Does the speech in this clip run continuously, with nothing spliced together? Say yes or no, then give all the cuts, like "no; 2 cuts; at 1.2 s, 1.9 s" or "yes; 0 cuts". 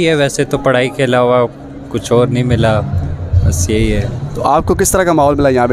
yes; 0 cuts